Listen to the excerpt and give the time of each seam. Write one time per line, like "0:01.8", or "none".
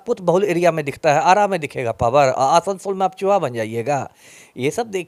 none